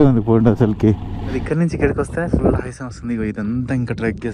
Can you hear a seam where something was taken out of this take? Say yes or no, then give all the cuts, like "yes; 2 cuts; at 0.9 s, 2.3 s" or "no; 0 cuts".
yes; 1 cut; at 1.4 s